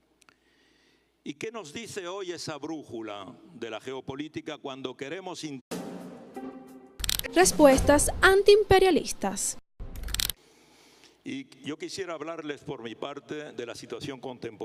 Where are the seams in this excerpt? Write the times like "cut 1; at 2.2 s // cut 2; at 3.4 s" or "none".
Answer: none